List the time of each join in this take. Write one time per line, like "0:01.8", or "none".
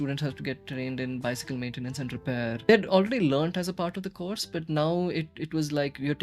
0:02.7